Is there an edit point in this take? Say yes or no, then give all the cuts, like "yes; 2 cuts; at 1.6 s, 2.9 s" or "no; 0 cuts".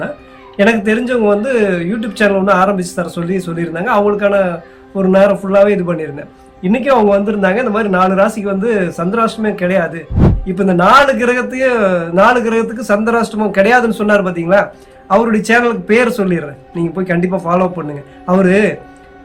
yes; 1 cut; at 10.2 s